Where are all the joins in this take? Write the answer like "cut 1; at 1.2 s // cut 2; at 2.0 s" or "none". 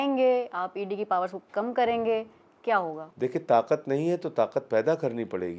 cut 1; at 3.0 s